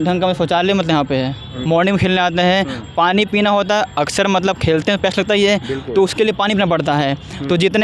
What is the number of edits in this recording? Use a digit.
1